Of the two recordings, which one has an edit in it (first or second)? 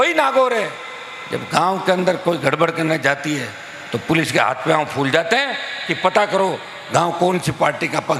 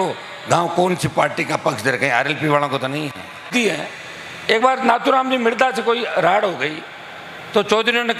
second